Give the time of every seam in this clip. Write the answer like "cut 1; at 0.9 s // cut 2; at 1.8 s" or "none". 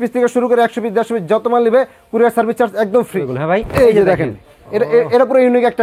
cut 1; at 3.2 s